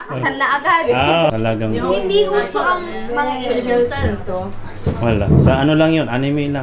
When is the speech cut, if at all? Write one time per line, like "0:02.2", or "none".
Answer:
0:01.3